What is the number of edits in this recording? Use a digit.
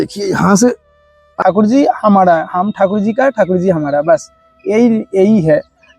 1